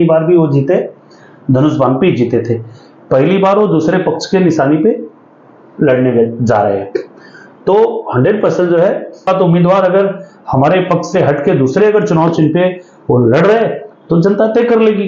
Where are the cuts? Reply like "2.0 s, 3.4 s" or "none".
9.3 s